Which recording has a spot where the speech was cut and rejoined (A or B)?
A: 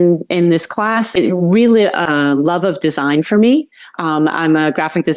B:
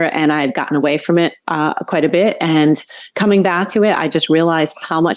A